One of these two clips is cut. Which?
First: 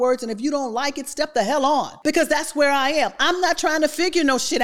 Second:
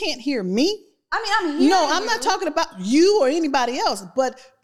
first; 1 cut; at 1.9 s

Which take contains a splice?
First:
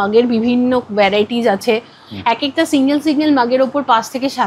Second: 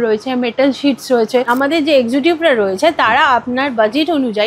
second; 1 cut; at 1.5 s

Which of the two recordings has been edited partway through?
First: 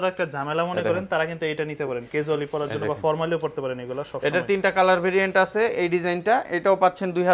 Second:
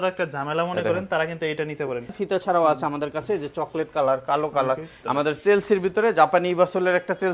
second; 2 cuts; at 2.1 s, 4.9 s

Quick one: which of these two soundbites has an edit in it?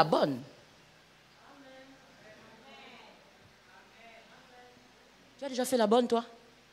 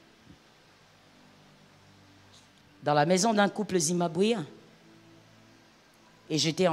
first; 1 cut; at 5.5 s

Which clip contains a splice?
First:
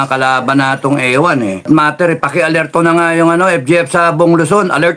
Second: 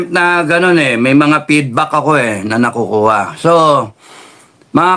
first; 1 cut; at 1.6 s

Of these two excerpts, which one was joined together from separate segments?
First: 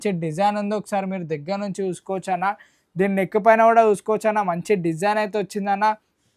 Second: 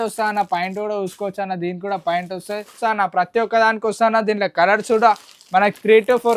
second; 1 cut; at 2.8 s

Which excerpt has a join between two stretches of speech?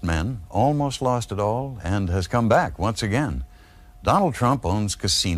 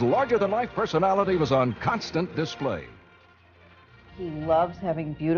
second; 1 cut; at 4.2 s

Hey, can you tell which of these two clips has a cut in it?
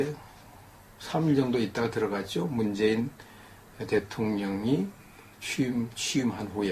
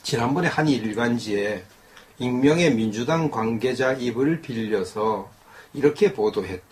first; 1 cut; at 4.5 s

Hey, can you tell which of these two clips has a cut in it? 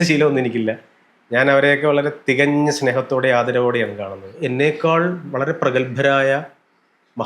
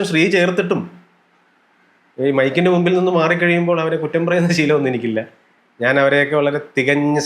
first; 1 cut; at 4.4 s

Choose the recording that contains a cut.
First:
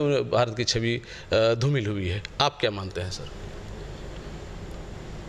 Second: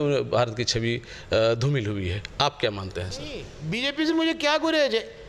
second; 1 cut; at 3.5 s

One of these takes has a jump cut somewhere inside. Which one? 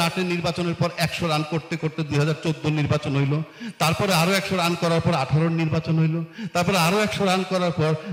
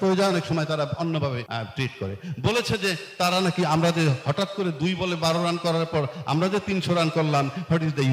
second; 1 cut; at 1.4 s

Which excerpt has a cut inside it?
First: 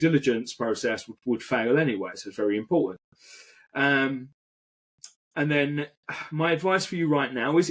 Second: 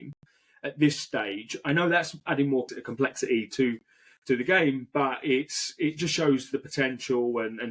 second; 1 cut; at 2.7 s

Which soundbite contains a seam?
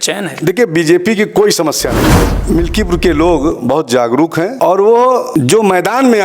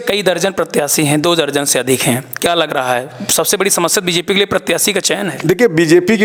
first; 3 cuts; at 2.3 s, 4.5 s, 5.3 s

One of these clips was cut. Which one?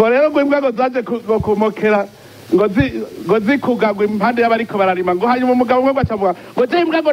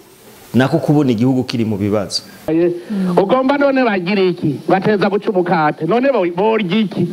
second; 1 cut; at 2.5 s

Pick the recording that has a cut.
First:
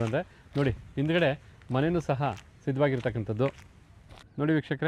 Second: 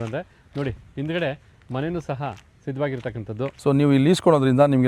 second; 1 cut; at 3.6 s

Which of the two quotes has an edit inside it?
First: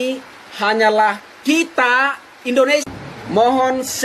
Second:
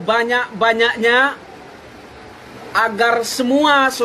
first; 1 cut; at 2.9 s

